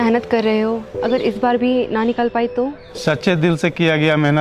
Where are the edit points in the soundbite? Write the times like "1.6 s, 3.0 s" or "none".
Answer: none